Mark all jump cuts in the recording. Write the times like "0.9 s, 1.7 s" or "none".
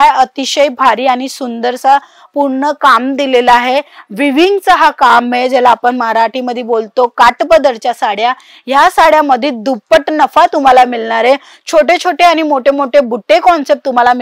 none